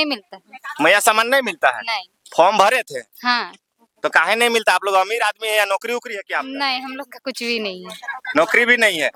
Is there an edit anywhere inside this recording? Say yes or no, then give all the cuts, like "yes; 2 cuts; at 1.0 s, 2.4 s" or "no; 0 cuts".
no; 0 cuts